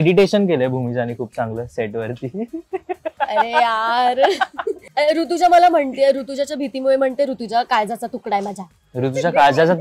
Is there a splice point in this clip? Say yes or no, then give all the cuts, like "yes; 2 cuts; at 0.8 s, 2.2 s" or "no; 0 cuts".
yes; 1 cut; at 4.8 s